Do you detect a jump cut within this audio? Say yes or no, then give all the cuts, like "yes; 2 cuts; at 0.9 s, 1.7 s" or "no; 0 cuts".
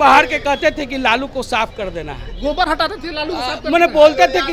no; 0 cuts